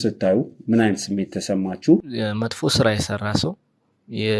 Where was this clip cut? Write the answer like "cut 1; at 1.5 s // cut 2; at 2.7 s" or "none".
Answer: cut 1; at 2.1 s